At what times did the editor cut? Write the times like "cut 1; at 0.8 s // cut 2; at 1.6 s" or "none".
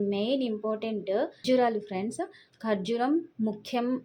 cut 1; at 1.3 s